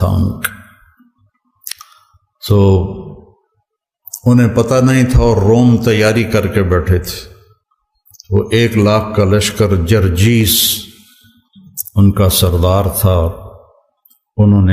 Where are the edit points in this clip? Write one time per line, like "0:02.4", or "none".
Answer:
none